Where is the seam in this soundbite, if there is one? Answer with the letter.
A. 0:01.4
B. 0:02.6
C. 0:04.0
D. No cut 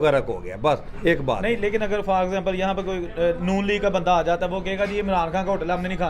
A